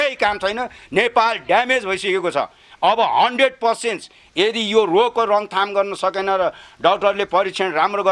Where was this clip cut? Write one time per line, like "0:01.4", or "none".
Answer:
none